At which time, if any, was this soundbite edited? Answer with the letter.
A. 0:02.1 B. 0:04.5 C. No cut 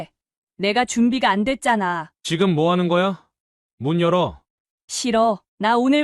A